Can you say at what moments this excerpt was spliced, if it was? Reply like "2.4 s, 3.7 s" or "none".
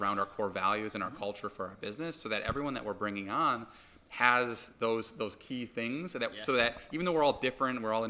none